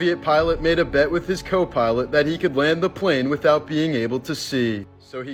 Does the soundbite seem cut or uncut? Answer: uncut